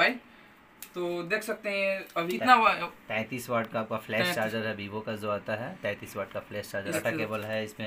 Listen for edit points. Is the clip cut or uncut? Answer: cut